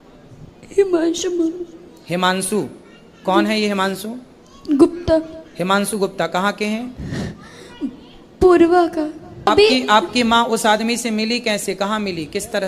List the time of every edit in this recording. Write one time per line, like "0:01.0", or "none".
0:09.5